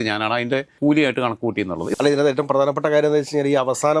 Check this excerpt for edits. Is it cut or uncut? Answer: cut